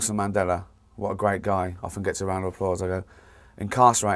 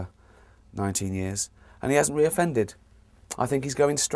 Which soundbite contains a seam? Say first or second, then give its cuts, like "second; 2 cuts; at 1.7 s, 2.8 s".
second; 1 cut; at 1.6 s